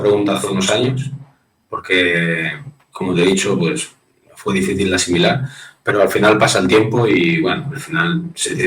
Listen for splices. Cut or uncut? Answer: uncut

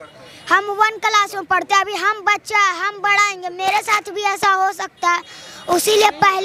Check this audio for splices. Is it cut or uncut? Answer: uncut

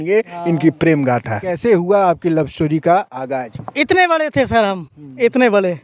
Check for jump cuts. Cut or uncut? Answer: cut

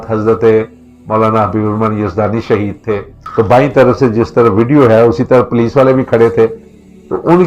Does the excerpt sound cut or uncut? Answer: cut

